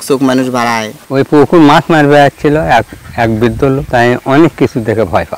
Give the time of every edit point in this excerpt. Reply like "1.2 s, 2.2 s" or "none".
1.0 s, 3.8 s